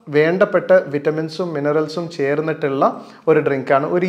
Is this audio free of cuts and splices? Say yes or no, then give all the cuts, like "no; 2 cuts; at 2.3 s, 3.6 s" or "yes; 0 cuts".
yes; 0 cuts